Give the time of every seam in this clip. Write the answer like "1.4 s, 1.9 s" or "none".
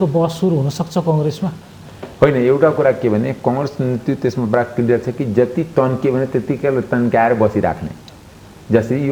none